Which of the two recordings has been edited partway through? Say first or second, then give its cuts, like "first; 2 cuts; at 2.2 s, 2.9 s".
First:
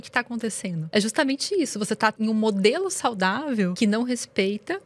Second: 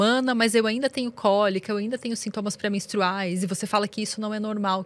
first; 3 cuts; at 0.8 s, 2.2 s, 3.7 s